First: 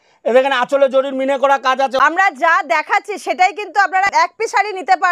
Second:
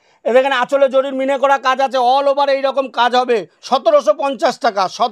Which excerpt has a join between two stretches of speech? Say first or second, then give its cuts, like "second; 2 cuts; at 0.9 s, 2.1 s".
first; 2 cuts; at 2.0 s, 4.1 s